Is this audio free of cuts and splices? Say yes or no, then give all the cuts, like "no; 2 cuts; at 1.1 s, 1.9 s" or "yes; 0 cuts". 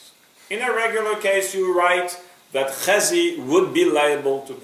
yes; 0 cuts